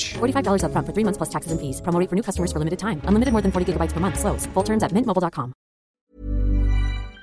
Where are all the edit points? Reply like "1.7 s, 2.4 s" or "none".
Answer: 5.9 s